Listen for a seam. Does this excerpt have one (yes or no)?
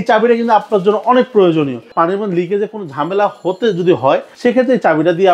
yes